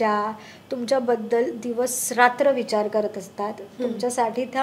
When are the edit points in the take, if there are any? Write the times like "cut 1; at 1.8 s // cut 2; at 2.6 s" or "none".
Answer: none